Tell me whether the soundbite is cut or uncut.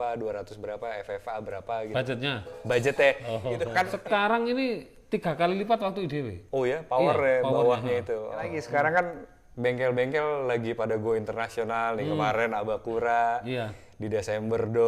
cut